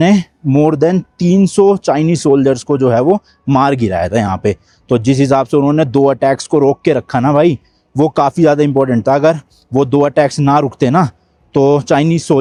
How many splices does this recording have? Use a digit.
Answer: 0